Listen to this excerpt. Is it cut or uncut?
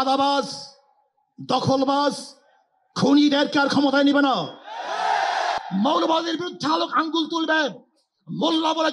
cut